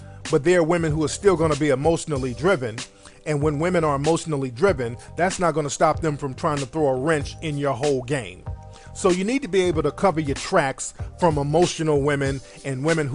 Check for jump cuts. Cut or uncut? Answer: cut